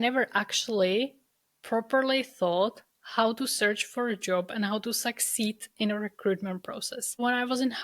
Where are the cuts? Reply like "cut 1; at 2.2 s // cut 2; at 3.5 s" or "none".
none